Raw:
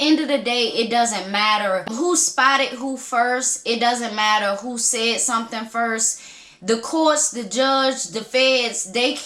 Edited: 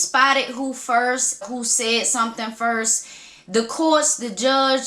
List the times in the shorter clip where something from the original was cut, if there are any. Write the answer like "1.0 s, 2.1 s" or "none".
1.4 s

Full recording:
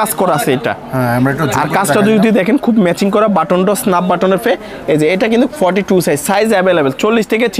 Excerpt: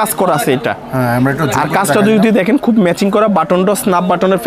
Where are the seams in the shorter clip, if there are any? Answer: none

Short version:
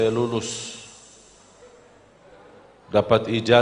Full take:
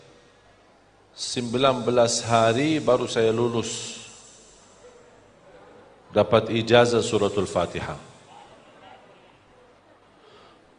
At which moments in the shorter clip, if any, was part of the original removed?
none

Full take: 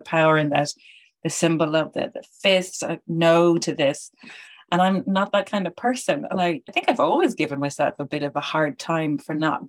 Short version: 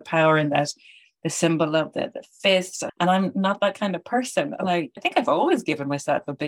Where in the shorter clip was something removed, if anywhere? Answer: 2.8 s

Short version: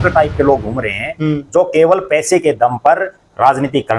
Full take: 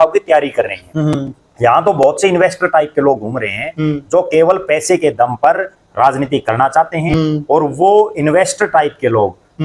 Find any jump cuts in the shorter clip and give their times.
none

